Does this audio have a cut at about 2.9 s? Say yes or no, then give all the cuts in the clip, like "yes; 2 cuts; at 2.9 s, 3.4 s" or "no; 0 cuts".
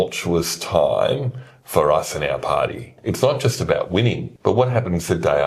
yes; 2 cuts; at 2.9 s, 4.3 s